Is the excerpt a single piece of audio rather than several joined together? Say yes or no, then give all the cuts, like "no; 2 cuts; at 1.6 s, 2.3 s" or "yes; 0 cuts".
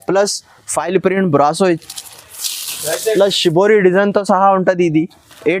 yes; 0 cuts